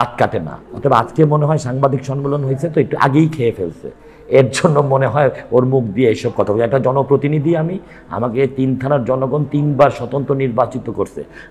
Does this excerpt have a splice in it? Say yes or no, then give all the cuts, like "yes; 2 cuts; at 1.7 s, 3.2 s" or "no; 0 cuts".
no; 0 cuts